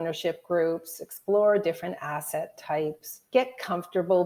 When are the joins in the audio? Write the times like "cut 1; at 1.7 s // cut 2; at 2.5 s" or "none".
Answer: cut 1; at 3.2 s